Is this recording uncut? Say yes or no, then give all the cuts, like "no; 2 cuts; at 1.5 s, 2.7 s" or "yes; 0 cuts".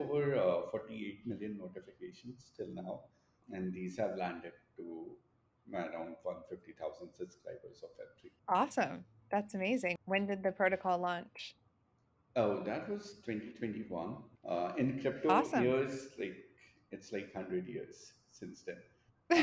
no; 3 cuts; at 8.3 s, 9.9 s, 14.3 s